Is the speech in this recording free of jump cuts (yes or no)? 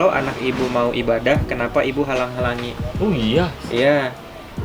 yes